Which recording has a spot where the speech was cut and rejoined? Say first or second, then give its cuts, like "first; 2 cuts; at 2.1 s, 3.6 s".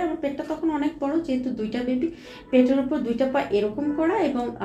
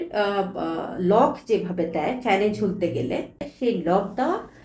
second; 1 cut; at 3.5 s